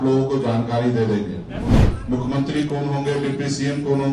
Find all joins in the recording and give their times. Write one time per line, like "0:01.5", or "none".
0:01.8